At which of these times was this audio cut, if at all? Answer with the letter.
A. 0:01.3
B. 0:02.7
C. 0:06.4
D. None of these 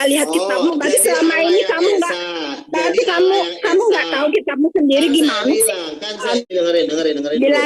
C